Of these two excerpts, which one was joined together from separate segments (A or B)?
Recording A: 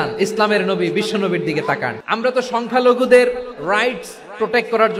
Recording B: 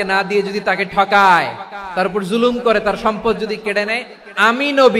A